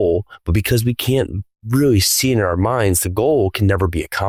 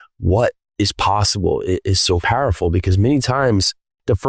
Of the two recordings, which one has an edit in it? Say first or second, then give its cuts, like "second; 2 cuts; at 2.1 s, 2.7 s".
second; 1 cut; at 2.2 s